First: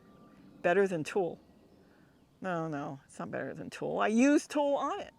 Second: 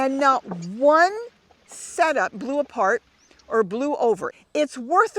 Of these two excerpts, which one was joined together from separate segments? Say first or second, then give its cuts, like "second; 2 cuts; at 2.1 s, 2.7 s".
second; 2 cuts; at 2.4 s, 4.3 s